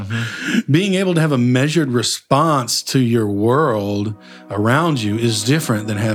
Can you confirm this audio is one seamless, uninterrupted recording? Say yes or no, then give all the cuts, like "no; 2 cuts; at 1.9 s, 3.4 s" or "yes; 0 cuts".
yes; 0 cuts